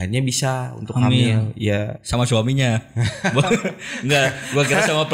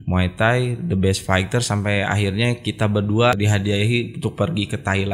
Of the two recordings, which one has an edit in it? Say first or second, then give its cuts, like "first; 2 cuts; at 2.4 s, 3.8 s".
second; 1 cut; at 3.4 s